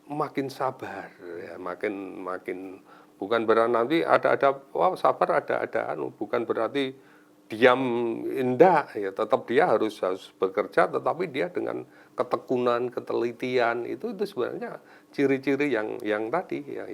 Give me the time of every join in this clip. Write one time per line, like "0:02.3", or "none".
none